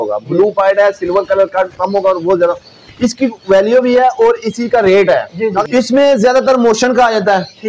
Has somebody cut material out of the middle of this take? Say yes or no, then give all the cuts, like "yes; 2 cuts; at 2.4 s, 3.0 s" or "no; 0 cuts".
yes; 1 cut; at 5.6 s